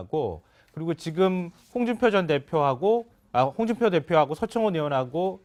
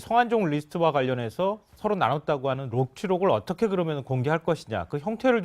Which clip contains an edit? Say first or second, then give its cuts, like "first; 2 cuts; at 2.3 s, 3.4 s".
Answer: second; 1 cut; at 1.7 s